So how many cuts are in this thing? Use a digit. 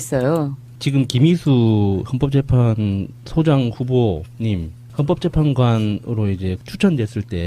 1